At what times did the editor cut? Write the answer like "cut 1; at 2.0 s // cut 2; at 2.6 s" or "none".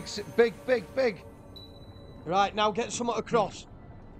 none